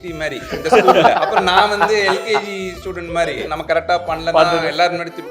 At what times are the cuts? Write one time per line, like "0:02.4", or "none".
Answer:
0:01.2
0:03.5